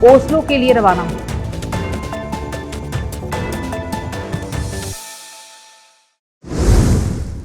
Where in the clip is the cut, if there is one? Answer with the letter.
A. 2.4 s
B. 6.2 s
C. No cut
B